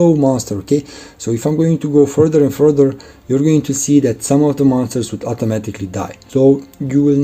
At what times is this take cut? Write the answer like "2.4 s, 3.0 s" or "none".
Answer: 6.2 s